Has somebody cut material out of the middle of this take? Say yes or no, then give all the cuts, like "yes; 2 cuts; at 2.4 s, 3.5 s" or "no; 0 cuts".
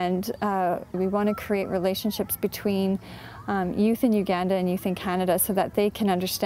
yes; 1 cut; at 0.9 s